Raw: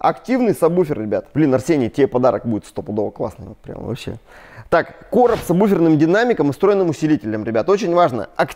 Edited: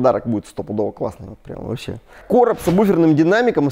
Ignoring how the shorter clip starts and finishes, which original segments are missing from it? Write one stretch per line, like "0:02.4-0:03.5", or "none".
0:04.3-0:05.0